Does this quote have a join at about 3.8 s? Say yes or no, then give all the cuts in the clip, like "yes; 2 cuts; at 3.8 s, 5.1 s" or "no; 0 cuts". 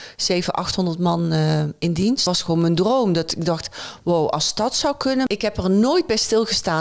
no; 2 cuts; at 2.2 s, 5.3 s